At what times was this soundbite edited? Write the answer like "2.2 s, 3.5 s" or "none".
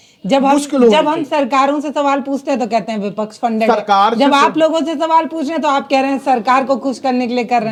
none